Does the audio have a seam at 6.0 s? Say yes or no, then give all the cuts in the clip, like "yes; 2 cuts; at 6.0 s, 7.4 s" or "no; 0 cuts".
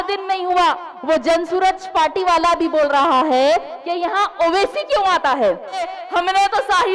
yes; 1 cut; at 6.0 s